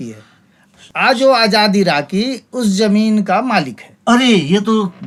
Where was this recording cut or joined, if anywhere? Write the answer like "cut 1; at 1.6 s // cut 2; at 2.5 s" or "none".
none